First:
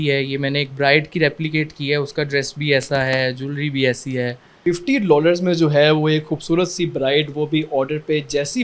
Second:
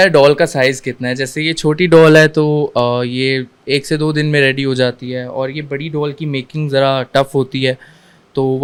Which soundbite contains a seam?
first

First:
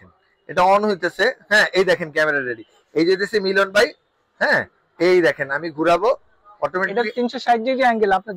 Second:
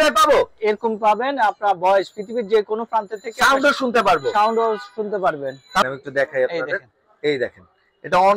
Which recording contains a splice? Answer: second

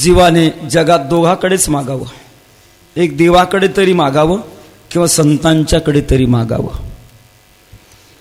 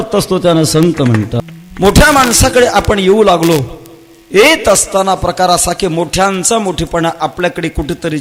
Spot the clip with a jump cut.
second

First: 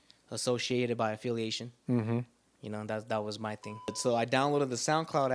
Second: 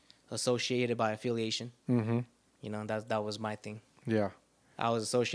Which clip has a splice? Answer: first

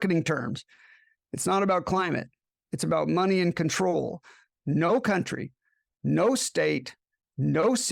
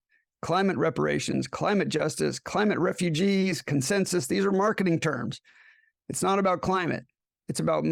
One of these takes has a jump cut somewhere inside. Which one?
first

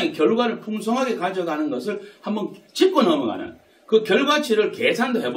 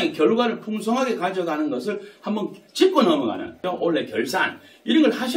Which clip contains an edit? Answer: second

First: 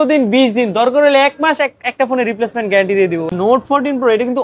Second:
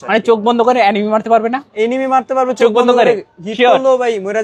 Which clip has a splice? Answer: first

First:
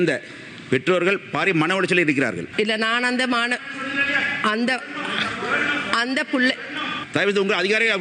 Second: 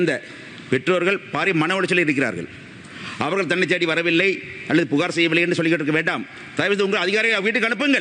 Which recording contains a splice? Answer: first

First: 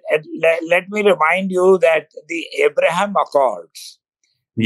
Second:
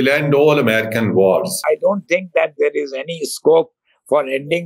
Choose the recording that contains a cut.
second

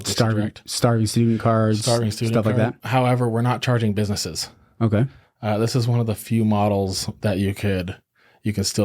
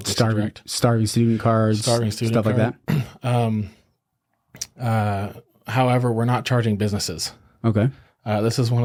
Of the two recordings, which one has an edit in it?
first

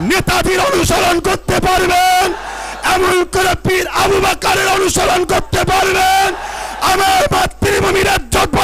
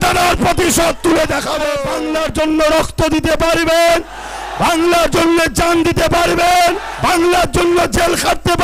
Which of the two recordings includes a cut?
second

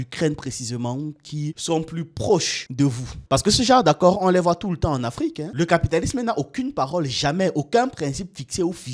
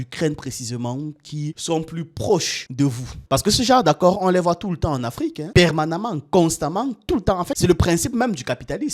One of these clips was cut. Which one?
first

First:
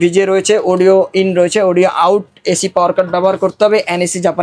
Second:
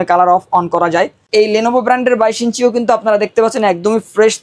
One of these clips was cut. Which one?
second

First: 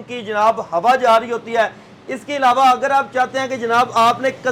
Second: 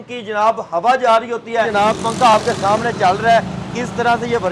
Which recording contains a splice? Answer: second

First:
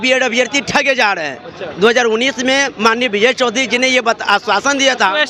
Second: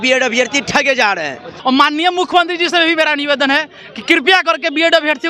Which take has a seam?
second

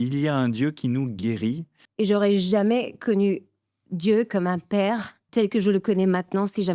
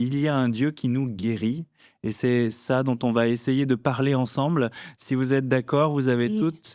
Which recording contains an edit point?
first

